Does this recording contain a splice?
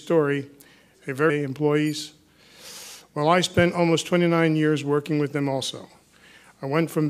no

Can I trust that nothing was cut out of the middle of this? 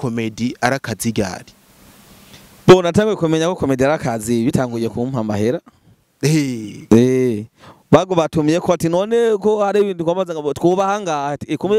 yes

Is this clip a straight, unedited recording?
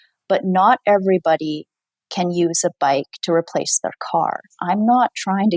no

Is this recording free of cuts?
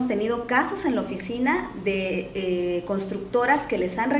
yes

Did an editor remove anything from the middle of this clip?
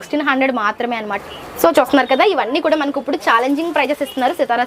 yes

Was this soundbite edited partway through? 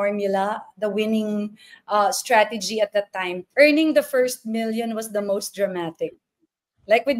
yes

